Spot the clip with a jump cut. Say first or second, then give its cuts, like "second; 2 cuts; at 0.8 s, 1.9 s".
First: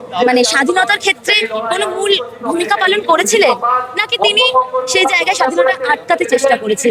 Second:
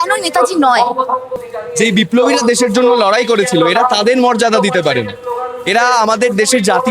second; 1 cut; at 1.4 s